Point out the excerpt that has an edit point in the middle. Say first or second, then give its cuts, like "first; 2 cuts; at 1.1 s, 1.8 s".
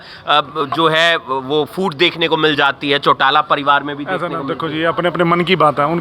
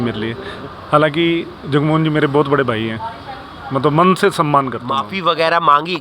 second; 1 cut; at 5.1 s